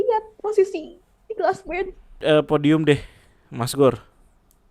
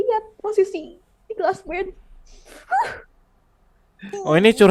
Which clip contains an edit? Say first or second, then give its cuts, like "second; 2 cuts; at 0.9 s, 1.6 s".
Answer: first; 1 cut; at 2.2 s